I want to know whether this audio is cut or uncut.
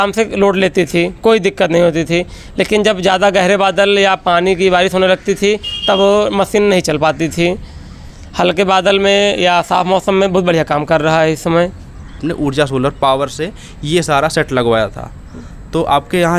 uncut